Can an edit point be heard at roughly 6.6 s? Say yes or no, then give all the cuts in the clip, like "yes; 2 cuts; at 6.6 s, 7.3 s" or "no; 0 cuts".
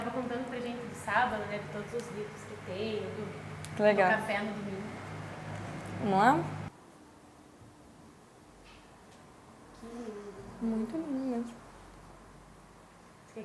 yes; 1 cut; at 6.6 s